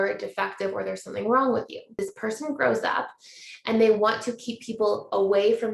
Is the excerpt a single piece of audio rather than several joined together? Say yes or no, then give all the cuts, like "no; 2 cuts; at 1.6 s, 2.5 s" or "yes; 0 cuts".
no; 1 cut; at 1.9 s